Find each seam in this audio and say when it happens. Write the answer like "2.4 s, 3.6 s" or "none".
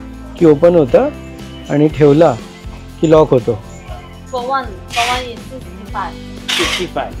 none